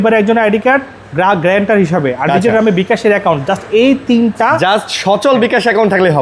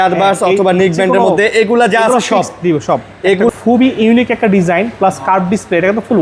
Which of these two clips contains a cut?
second; 1 cut; at 3.5 s

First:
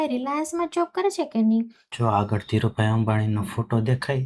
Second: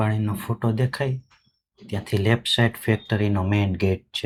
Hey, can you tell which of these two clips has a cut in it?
first; 1 cut; at 1.8 s

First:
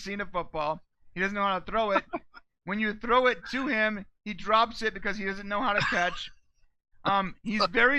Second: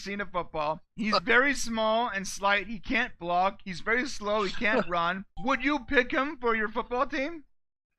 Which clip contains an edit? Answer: second; 2 cuts; at 0.9 s, 5.3 s

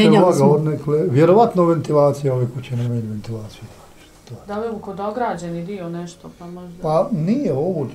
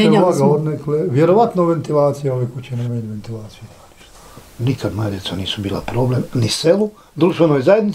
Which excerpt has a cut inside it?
second; 1 cut; at 4.3 s

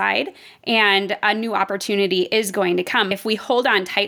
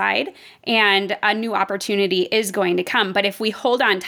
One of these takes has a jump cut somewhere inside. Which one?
first; 1 cut; at 3.1 s

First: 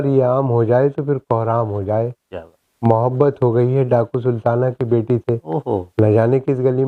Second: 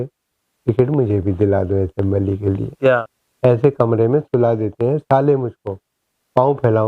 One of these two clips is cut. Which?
second; 1 cut; at 3.2 s

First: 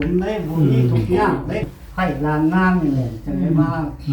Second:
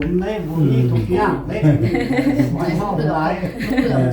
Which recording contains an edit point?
first; 1 cut; at 1.6 s

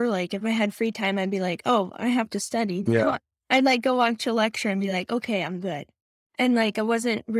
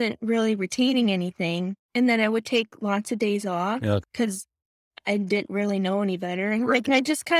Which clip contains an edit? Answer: second; 2 cuts; at 1.8 s, 4.0 s

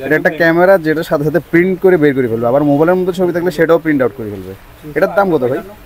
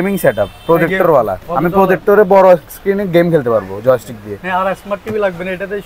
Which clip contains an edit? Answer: second; 1 cut; at 1.4 s

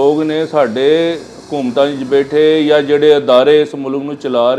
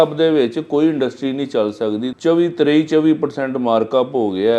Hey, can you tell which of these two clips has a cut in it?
second; 1 cut; at 2.1 s

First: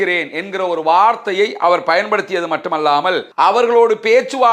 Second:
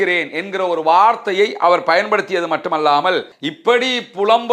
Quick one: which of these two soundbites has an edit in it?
second; 1 cut; at 3.3 s

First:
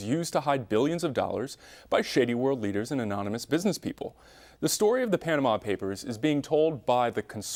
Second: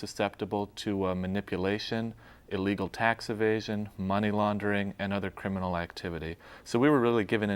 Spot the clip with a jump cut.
second; 1 cut; at 4.8 s

